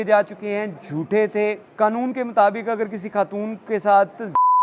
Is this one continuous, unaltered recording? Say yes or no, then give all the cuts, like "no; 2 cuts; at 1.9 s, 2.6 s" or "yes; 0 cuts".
no; 1 cut; at 1.6 s